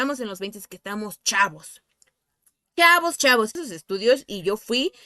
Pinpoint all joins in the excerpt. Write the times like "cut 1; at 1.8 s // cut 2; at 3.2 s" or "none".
cut 1; at 3.7 s